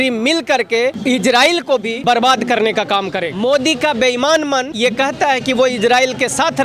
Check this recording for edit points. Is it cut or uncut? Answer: cut